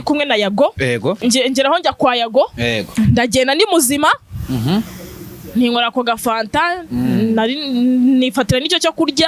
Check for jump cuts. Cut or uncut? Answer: cut